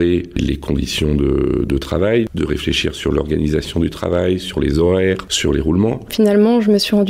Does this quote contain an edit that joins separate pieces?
yes; 1 cut; at 6.1 s

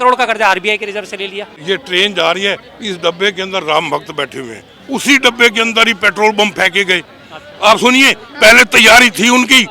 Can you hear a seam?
yes; 2 cuts; at 1.6 s, 4.7 s

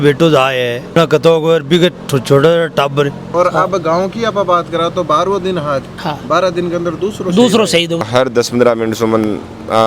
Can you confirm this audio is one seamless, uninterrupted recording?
no; 2 cuts; at 3.3 s, 8.0 s

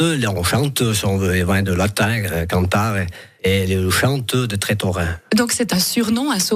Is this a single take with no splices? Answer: yes; 0 cuts

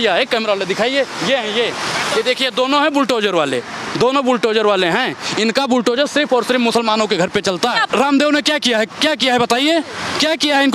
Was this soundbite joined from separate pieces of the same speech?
yes; 1 cut; at 7.9 s

